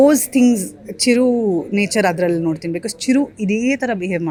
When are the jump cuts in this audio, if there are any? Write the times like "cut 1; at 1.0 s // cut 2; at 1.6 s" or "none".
none